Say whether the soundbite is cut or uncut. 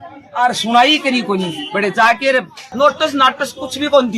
cut